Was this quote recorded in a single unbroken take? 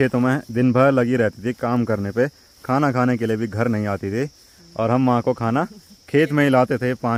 yes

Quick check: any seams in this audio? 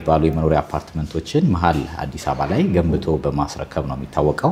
no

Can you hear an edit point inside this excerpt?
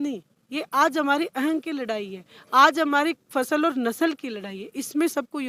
no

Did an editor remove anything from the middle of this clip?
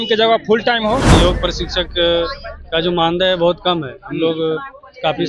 yes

